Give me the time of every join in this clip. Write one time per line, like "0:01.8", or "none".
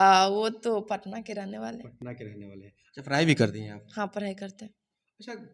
none